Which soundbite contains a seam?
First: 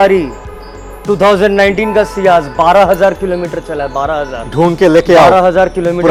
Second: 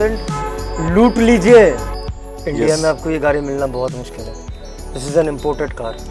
second; 1 cut; at 1.9 s

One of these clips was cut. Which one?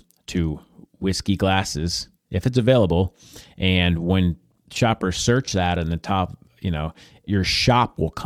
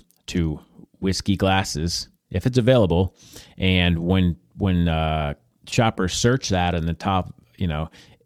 first; 2 cuts; at 4.5 s, 7.3 s

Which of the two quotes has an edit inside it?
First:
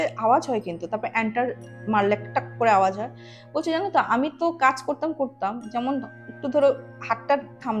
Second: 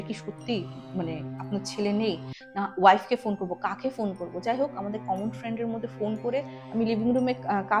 second; 1 cut; at 6.6 s

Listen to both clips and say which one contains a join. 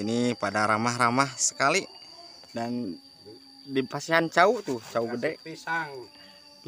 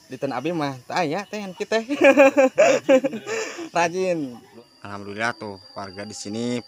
second; 1 cut; at 4.4 s

